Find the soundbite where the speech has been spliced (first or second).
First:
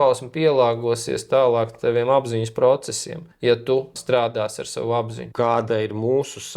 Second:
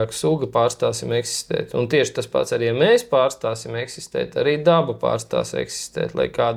first